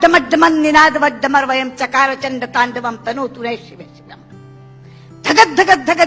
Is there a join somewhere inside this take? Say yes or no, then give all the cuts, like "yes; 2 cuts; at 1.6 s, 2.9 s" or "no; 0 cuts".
no; 0 cuts